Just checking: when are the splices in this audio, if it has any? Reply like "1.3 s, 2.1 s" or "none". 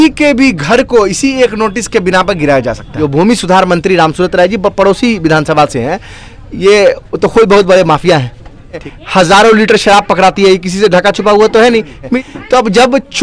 2.9 s, 8.9 s, 12.1 s